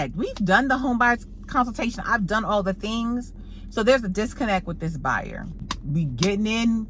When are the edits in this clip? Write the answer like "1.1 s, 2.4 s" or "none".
5.6 s